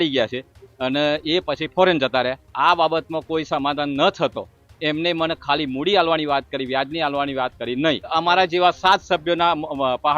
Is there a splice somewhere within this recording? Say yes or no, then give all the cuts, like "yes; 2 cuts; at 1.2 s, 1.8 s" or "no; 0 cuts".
yes; 2 cuts; at 2.4 s, 8.1 s